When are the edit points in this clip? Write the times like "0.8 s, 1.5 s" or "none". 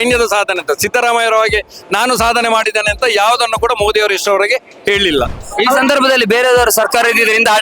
5.4 s